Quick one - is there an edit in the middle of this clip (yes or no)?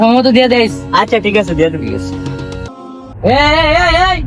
yes